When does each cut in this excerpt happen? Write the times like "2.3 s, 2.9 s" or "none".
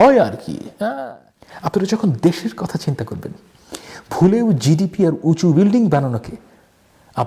0.9 s